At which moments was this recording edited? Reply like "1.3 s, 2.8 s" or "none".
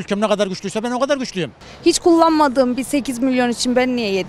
1.5 s